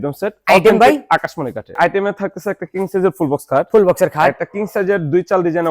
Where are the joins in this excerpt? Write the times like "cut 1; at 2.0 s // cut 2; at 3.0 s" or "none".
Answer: cut 1; at 1.7 s